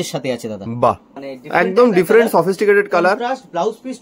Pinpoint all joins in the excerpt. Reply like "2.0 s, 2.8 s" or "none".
1.1 s

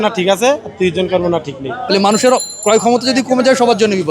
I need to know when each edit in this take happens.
1.8 s

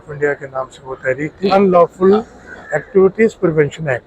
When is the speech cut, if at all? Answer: 1.5 s

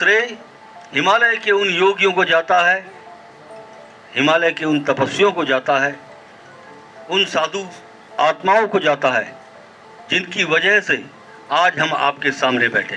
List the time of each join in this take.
none

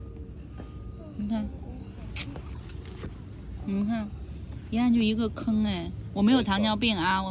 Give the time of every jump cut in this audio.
none

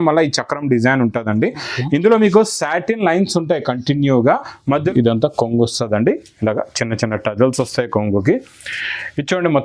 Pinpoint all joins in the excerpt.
4.8 s

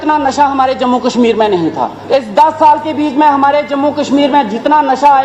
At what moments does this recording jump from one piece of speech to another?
1.9 s

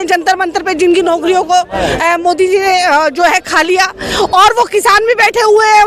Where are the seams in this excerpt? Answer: none

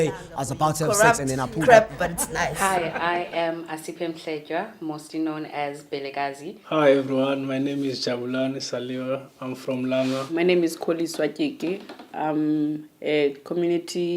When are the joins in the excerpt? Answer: 8.9 s

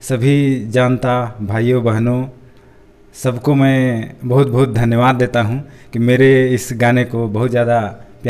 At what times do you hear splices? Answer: none

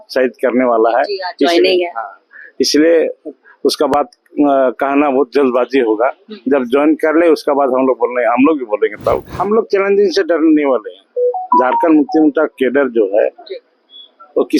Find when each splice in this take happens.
9.3 s

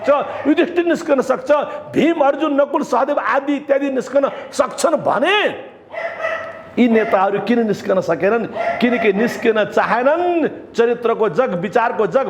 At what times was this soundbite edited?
none

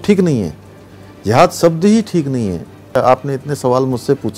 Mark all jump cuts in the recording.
2.9 s

